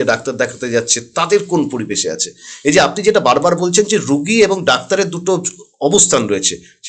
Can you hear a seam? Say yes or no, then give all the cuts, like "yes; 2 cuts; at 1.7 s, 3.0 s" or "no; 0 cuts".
no; 0 cuts